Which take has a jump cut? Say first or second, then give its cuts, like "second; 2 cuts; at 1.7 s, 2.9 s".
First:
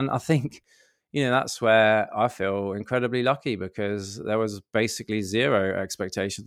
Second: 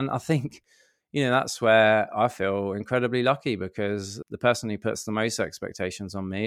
second; 1 cut; at 4.1 s